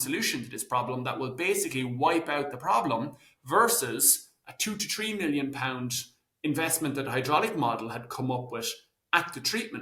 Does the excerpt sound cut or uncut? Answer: uncut